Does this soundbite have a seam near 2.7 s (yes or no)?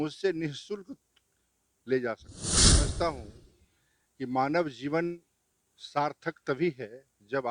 yes